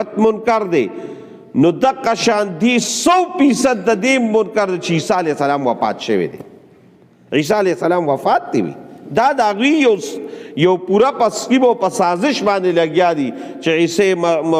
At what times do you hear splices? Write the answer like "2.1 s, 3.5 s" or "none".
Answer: 2.5 s